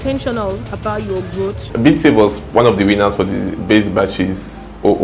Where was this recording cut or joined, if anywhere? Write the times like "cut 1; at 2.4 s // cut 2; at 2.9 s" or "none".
cut 1; at 1.6 s

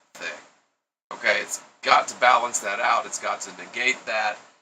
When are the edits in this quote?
cut 1; at 2.4 s

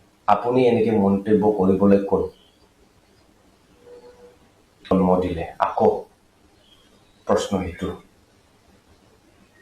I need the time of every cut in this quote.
cut 1; at 4.8 s

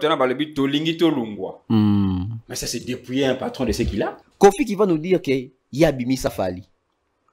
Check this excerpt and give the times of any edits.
cut 1; at 4.2 s

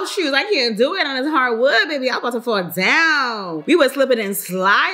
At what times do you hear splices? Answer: none

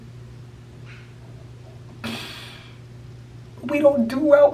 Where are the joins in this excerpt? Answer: none

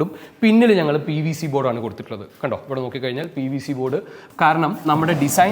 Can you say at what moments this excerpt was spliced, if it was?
cut 1; at 4.2 s

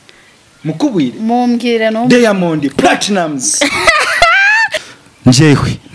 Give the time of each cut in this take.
cut 1; at 4.8 s

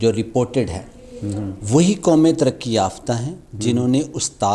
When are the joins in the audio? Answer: none

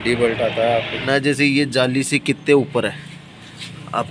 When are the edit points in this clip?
cut 1; at 1.0 s

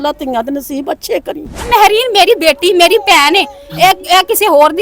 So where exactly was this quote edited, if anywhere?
cut 1; at 1.7 s

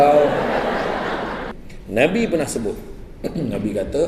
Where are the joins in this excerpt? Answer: cut 1; at 1.5 s

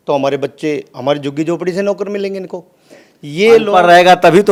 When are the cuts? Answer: none

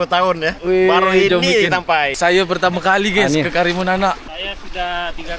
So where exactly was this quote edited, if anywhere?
cut 1; at 2.1 s // cut 2; at 4.3 s

